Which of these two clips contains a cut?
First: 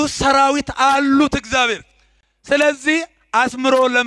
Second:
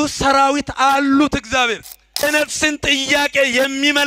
second; 1 cut; at 2.2 s

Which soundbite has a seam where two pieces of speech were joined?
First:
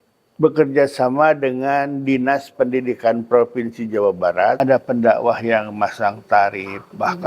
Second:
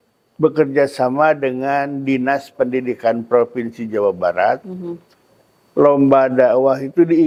first; 1 cut; at 4.6 s

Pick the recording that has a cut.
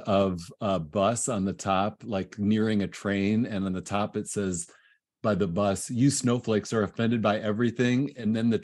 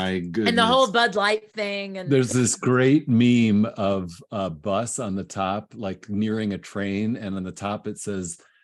second; 1 cut; at 1.9 s

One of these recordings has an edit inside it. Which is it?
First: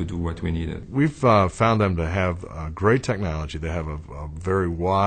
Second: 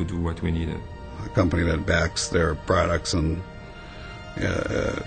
second; 1 cut; at 0.9 s

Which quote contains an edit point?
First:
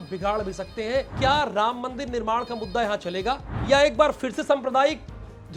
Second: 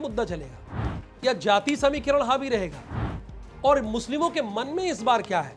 first; 2 cuts; at 1.1 s, 3.5 s

